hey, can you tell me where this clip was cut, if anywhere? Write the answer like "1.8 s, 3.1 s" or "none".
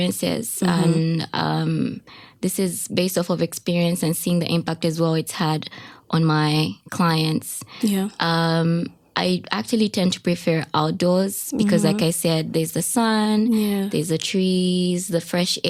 none